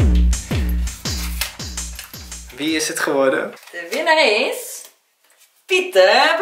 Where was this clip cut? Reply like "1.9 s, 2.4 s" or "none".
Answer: none